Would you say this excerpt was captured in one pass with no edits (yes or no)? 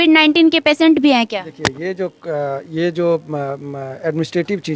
yes